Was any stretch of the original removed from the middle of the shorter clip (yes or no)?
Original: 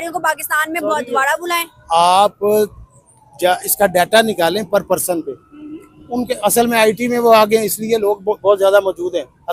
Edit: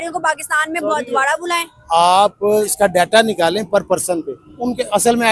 yes